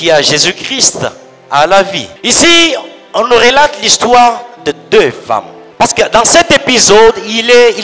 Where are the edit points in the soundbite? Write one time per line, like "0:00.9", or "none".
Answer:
0:02.1
0:05.6